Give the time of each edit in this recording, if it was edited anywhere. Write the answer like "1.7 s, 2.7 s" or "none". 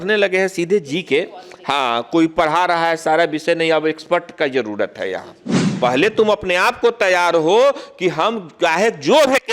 5.6 s